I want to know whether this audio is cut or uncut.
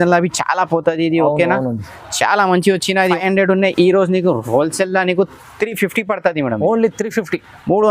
cut